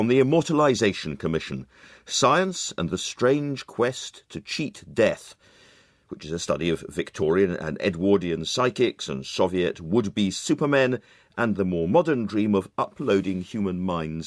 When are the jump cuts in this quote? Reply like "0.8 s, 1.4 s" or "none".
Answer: 10.1 s